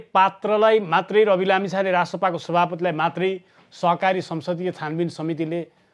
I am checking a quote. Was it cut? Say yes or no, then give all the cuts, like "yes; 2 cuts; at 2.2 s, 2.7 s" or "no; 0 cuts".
no; 0 cuts